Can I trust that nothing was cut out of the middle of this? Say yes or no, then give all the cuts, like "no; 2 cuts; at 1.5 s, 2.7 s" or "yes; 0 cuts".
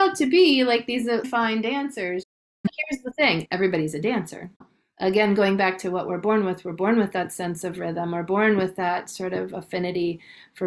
yes; 0 cuts